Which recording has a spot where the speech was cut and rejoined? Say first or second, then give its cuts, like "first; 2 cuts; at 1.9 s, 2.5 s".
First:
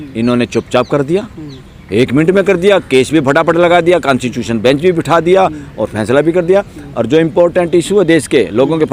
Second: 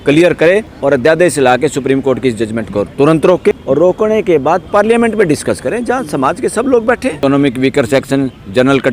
second; 1 cut; at 7.2 s